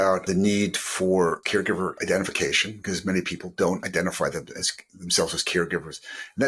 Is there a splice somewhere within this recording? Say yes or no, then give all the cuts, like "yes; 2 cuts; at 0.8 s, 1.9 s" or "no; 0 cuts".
yes; 1 cut; at 1.6 s